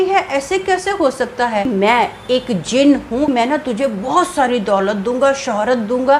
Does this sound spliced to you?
yes; 2 cuts; at 1.7 s, 3.3 s

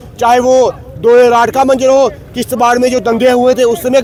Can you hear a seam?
no; 0 cuts

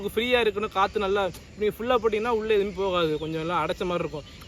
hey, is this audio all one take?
yes; 0 cuts

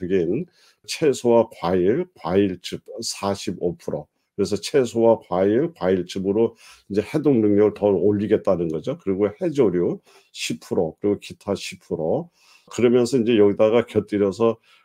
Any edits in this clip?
yes; 2 cuts; at 0.9 s, 12.7 s

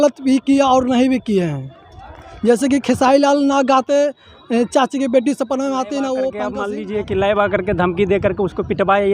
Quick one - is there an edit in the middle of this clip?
yes; 1 cut; at 6.6 s

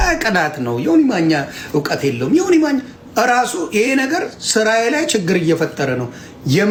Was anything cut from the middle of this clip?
no; 0 cuts

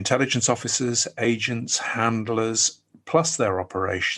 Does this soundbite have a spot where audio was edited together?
no; 0 cuts

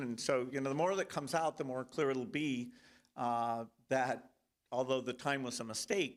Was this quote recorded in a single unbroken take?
yes; 0 cuts

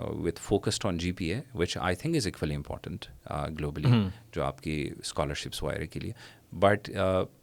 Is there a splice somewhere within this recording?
no; 0 cuts

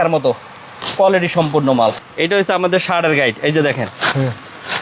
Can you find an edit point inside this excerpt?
yes; 1 cut; at 2.1 s

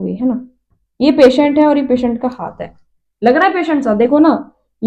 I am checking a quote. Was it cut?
no; 0 cuts

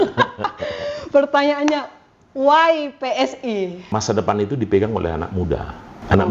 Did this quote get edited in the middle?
yes; 1 cut; at 3.8 s

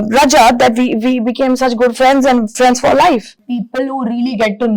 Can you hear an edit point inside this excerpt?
yes; 1 cut; at 3.4 s

